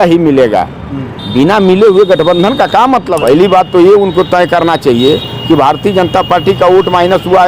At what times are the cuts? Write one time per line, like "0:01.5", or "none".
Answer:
0:03.1

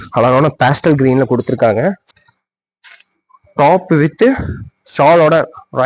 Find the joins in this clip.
0:02.1

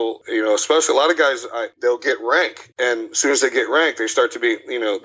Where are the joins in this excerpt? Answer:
0:01.7
0:02.6

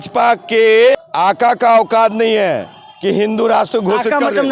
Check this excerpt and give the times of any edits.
0:01.1

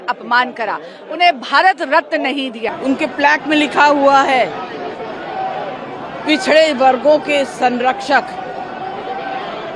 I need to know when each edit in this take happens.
0:02.7

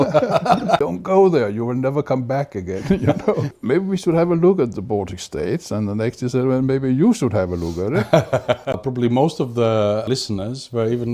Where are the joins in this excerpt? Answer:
0:00.8
0:03.5
0:08.8
0:10.0

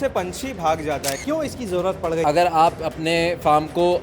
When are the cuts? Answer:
0:01.1
0:02.2

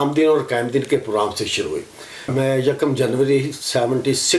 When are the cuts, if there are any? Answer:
0:02.3

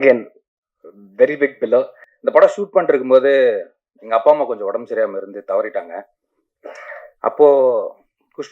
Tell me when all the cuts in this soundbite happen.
0:02.0

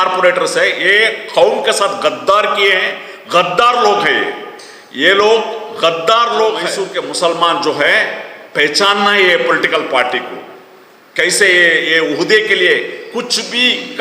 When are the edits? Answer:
0:06.8

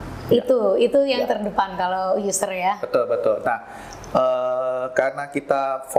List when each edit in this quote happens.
none

